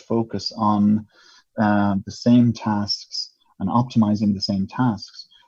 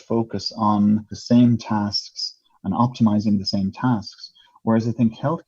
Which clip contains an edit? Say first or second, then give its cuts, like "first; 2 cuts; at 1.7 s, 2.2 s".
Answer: second; 1 cut; at 1.1 s